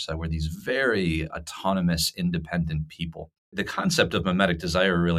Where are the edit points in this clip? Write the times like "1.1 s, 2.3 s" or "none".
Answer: 3.6 s